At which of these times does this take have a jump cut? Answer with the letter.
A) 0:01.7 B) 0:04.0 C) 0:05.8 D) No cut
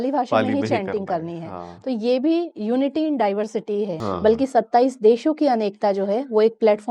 B